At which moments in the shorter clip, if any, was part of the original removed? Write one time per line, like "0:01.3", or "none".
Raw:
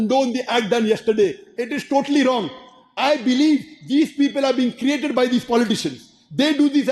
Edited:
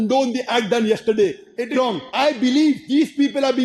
0:01.8
0:02.8